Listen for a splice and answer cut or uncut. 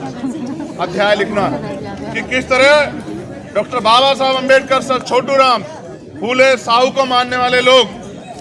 uncut